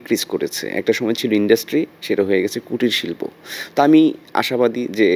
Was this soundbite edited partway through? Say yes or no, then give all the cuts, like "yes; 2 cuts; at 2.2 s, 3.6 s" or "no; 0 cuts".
no; 0 cuts